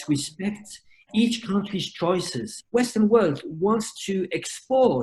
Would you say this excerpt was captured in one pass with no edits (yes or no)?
no